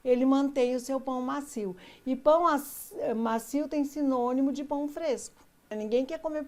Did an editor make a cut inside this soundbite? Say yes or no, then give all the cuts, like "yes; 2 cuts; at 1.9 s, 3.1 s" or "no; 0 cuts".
yes; 1 cut; at 5.6 s